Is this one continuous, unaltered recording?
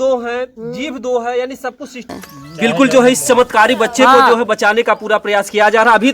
no; 1 cut; at 2.1 s

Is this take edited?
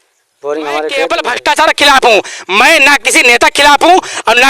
yes; 1 cut; at 1.2 s

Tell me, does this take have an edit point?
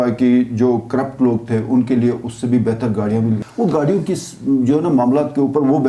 yes; 1 cut; at 3.4 s

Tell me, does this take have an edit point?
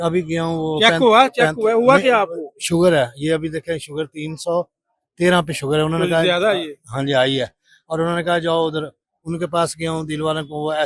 no; 0 cuts

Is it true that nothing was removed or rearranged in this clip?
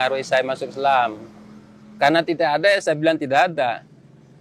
yes; 0 cuts

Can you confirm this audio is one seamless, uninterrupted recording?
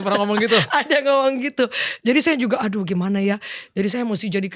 yes; 0 cuts

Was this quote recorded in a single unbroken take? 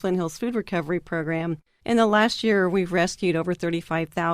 no; 1 cut; at 1.7 s

